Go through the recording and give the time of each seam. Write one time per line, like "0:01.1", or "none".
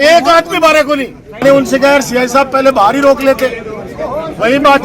0:01.3